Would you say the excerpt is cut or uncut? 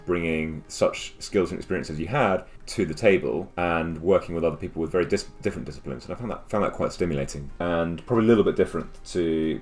cut